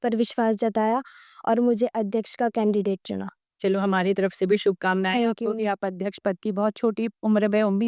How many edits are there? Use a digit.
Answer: 0